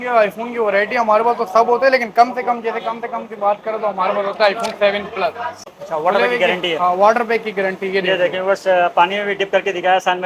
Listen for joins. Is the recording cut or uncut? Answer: cut